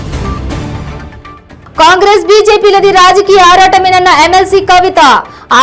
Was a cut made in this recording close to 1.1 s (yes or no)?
yes